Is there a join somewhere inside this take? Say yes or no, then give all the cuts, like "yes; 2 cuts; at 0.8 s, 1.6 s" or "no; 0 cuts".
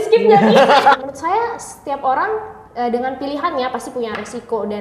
yes; 1 cut; at 1.0 s